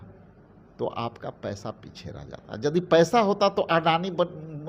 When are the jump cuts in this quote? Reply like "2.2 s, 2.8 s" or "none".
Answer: none